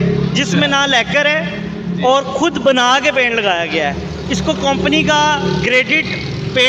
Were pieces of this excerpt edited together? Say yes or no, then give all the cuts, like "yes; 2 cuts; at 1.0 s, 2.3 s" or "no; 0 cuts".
no; 0 cuts